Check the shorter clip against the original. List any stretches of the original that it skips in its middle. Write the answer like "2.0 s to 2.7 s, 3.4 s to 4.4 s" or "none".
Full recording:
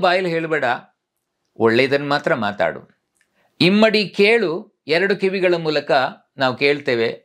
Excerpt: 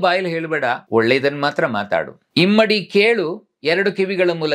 0.8 s to 1.5 s, 2.9 s to 3.4 s

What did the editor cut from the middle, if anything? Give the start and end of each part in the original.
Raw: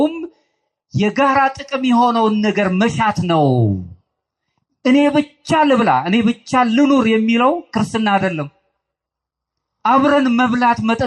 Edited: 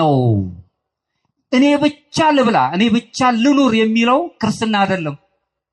none

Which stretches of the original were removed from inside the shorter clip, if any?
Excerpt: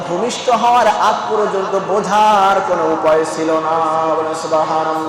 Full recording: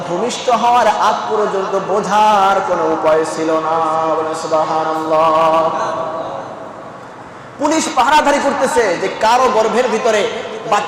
none

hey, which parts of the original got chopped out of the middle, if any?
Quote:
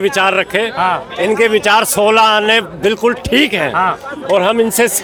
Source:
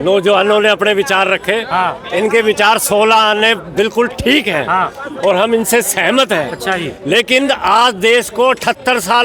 none

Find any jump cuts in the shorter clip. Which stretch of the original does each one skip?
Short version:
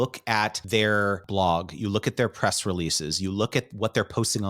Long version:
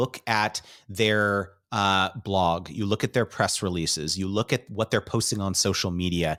1.0 s to 2.0 s

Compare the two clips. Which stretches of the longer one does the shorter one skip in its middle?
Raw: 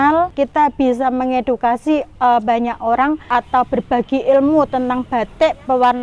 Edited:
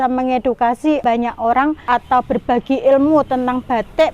2.0 s to 2.4 s

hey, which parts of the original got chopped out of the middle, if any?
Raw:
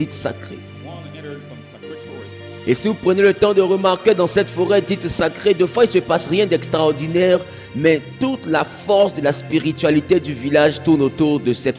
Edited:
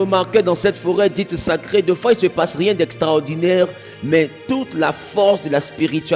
none

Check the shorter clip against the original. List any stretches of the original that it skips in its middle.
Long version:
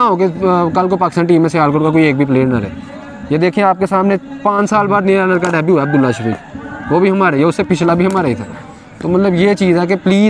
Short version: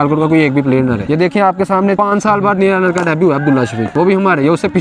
2.6 s to 3.2 s, 4.2 s to 4.4 s, 6.3 s to 6.8 s

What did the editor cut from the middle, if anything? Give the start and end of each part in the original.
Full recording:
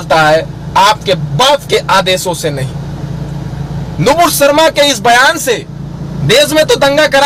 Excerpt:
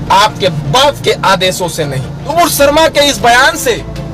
3.0 s to 4.1 s

